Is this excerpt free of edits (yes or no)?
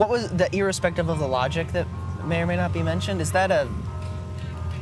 yes